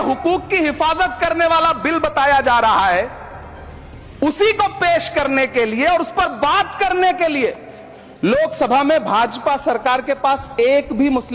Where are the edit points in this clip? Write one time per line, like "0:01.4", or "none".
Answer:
none